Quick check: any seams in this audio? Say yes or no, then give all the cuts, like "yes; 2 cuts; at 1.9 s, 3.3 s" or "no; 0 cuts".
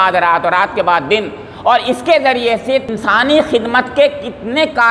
yes; 1 cut; at 3.0 s